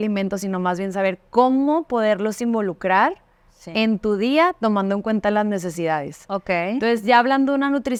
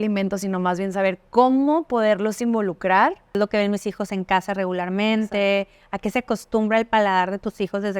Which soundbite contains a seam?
second; 1 cut; at 3.3 s

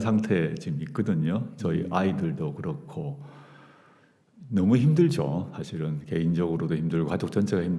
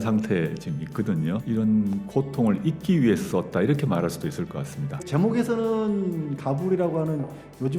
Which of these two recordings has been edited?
second; 2 cuts; at 1.4 s, 5.0 s

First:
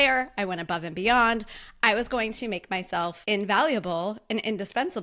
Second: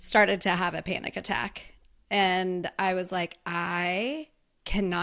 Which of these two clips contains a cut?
first; 1 cut; at 3.2 s

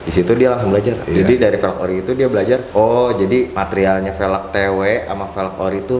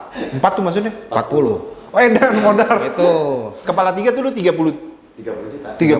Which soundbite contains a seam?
first; 3 cuts; at 1.0 s, 2.7 s, 3.6 s

